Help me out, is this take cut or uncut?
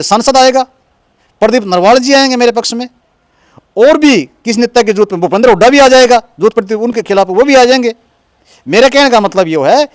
uncut